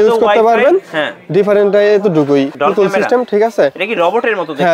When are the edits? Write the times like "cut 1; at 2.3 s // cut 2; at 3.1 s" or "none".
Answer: cut 1; at 2.5 s